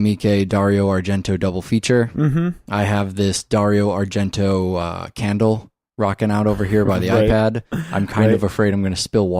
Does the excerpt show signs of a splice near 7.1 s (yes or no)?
yes